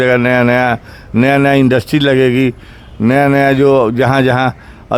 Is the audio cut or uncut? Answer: uncut